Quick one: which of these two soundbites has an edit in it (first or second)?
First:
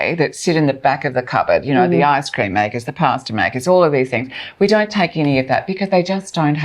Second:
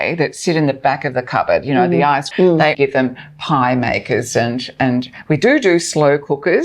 second